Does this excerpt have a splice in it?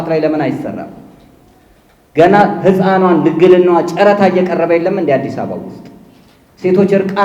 no; 0 cuts

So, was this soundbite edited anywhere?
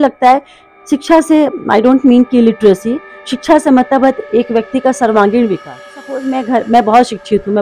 yes; 1 cut; at 6.2 s

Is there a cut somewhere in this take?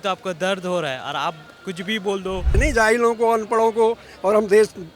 yes; 1 cut; at 2.5 s

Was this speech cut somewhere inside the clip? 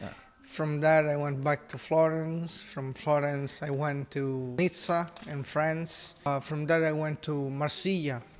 yes; 2 cuts; at 4.6 s, 6.3 s

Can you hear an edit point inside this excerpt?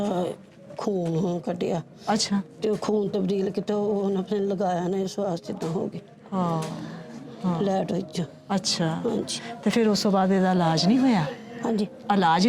no; 0 cuts

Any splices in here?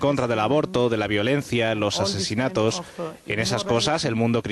yes; 1 cut; at 1.9 s

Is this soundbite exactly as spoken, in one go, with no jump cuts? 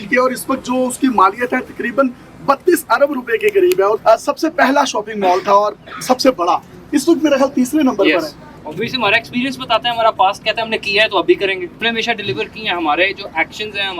no; 3 cuts; at 4.0 s, 8.6 s, 11.8 s

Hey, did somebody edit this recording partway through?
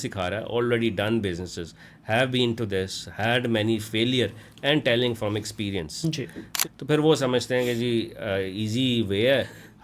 yes; 1 cut; at 6.5 s

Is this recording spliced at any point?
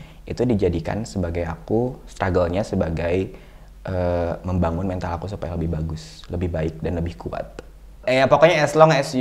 yes; 1 cut; at 7.9 s

